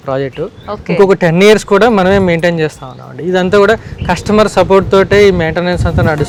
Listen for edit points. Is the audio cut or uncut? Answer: uncut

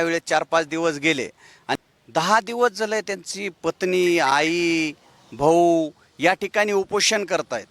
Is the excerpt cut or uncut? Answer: cut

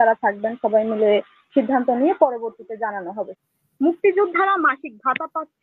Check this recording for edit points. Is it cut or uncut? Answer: cut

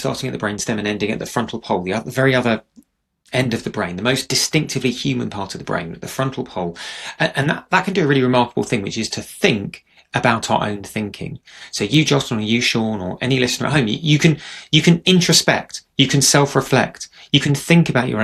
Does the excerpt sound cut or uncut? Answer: uncut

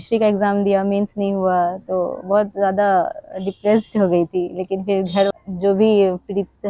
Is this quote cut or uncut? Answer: cut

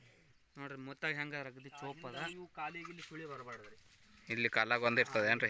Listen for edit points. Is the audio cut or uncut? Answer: cut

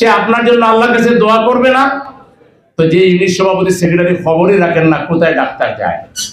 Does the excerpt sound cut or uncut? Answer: uncut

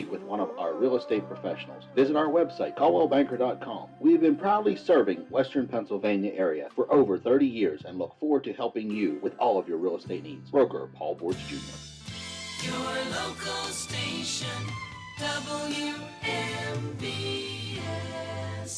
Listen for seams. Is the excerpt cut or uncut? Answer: cut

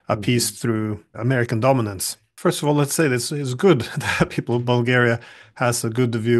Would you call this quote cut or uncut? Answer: cut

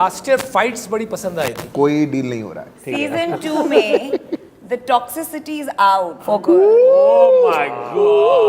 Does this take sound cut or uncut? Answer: cut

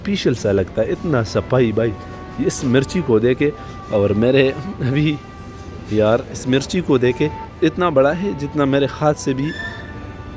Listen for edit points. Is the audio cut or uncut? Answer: cut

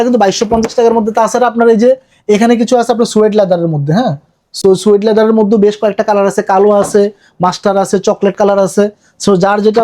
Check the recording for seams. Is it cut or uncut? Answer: uncut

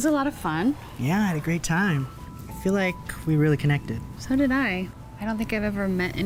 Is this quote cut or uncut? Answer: uncut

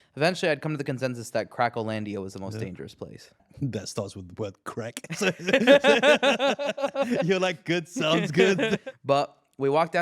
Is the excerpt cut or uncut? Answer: cut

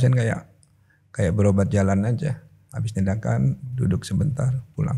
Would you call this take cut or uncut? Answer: uncut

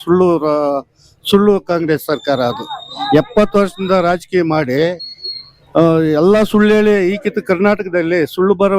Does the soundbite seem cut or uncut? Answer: uncut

